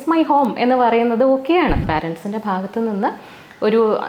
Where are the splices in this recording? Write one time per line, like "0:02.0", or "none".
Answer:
0:01.8